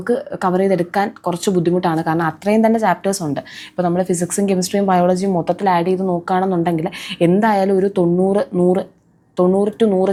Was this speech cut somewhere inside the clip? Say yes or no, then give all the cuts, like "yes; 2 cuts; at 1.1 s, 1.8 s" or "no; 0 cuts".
no; 0 cuts